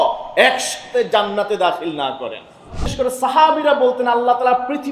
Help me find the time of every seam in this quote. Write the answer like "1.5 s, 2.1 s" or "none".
2.9 s